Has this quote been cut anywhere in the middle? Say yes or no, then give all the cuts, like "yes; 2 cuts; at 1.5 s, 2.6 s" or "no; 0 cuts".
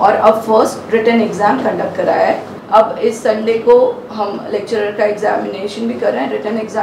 yes; 1 cut; at 2.5 s